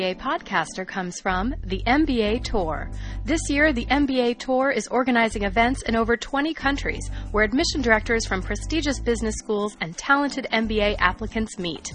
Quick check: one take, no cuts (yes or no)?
yes